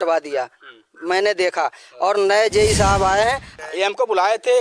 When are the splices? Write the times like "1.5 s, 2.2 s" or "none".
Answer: 3.5 s